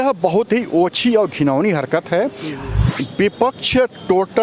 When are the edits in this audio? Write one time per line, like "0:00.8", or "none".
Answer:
0:02.9